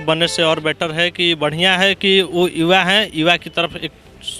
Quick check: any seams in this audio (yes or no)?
no